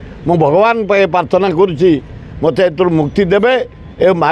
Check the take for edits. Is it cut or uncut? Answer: uncut